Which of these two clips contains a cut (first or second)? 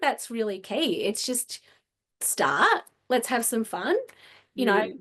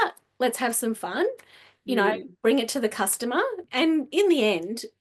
second